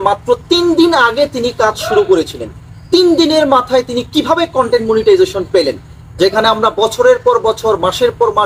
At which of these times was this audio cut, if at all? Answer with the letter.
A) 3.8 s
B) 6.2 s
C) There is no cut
C